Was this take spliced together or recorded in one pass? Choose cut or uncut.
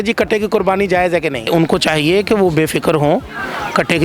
cut